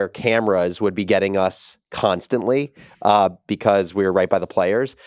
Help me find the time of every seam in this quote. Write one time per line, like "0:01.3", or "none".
none